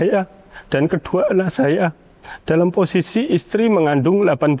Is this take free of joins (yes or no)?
yes